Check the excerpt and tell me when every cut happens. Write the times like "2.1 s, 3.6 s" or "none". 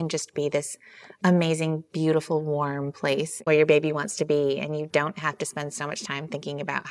3.4 s